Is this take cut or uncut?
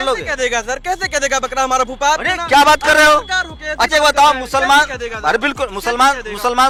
uncut